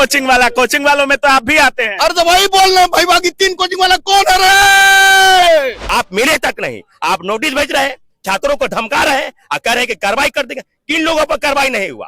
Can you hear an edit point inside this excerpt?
yes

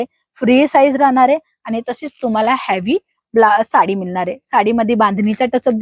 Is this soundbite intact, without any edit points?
yes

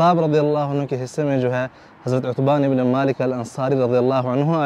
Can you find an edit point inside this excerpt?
no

